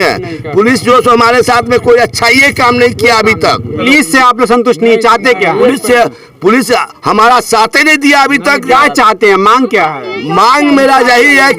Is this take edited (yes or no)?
no